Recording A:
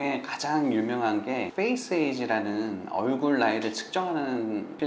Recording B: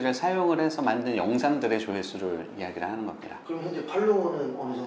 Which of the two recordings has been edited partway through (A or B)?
B